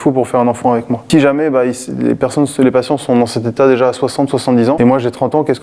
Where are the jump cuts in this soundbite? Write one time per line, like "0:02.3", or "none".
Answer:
0:01.0
0:04.8